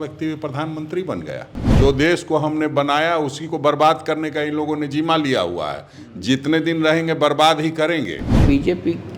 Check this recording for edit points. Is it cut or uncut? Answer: cut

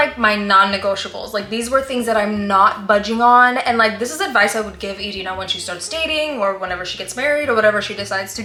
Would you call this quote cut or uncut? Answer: uncut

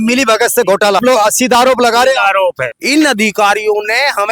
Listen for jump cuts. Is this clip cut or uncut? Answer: cut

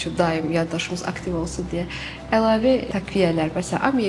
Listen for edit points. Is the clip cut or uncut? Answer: cut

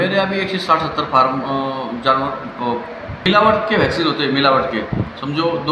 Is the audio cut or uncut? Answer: cut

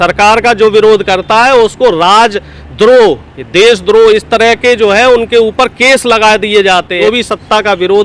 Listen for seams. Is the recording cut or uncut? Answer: cut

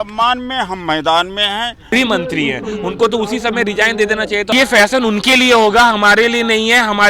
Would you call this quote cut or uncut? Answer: cut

